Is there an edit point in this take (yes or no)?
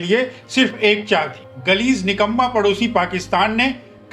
yes